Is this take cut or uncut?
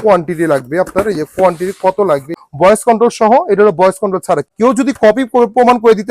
cut